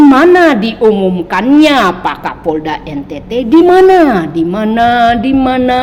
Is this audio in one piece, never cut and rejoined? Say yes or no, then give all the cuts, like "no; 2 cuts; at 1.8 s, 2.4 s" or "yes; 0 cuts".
yes; 0 cuts